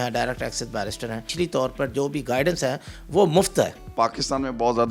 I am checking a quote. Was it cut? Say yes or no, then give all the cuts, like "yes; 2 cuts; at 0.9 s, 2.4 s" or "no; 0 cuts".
yes; 2 cuts; at 1.3 s, 3.8 s